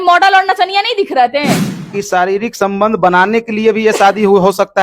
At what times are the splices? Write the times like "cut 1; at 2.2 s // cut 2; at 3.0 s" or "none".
cut 1; at 1.8 s